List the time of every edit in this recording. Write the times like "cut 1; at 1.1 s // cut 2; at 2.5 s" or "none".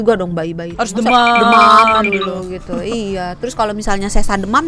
none

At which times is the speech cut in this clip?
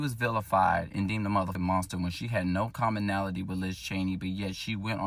cut 1; at 1.5 s

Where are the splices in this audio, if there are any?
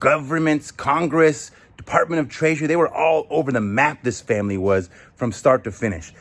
none

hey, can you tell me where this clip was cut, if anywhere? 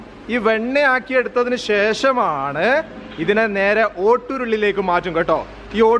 none

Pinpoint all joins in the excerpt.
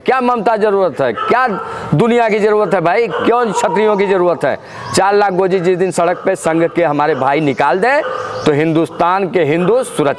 none

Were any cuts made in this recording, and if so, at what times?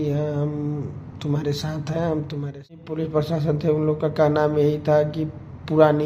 cut 1; at 2.9 s

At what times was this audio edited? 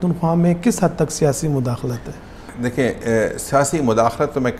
none

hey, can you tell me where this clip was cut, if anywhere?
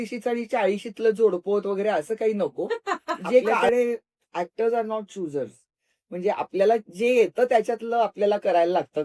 cut 1; at 3.5 s

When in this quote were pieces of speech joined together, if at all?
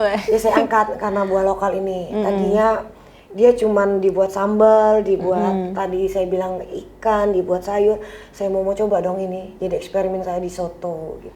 none

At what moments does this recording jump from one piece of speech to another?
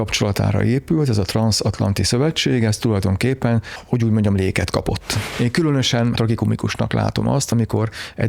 cut 1; at 5.2 s // cut 2; at 6.2 s

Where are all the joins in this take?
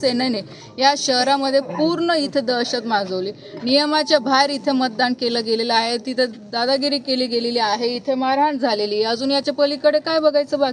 none

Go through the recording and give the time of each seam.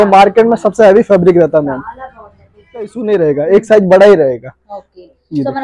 cut 1; at 3.0 s

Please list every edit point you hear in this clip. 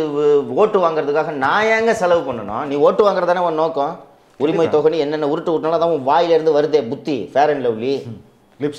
none

